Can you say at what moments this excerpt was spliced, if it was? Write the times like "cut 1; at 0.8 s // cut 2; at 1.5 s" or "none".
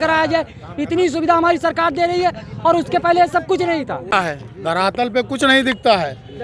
cut 1; at 4.1 s